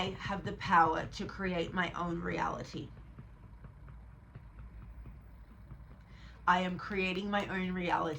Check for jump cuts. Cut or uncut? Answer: uncut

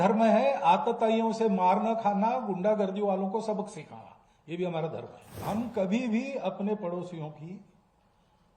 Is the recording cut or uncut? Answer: cut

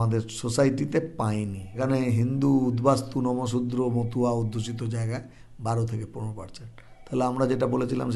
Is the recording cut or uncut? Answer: cut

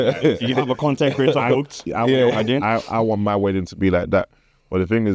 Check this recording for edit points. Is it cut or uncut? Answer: uncut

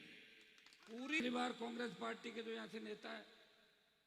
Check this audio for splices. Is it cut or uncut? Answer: cut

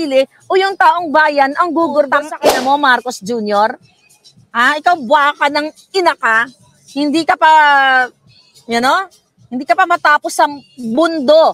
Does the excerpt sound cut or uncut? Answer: cut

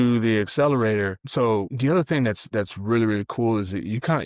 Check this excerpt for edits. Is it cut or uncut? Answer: uncut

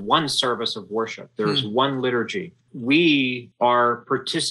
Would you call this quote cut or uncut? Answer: cut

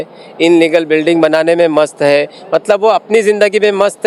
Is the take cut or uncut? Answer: uncut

